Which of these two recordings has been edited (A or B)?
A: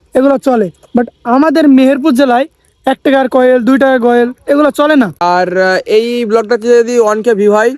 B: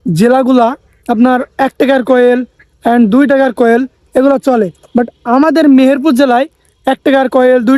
A